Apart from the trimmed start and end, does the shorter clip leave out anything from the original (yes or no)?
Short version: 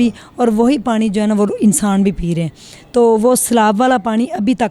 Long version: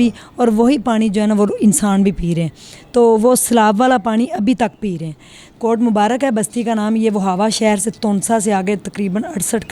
no